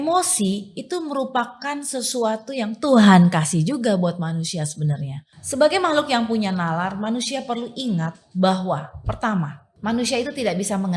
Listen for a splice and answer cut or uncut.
cut